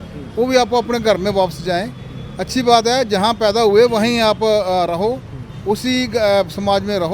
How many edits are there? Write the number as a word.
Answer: zero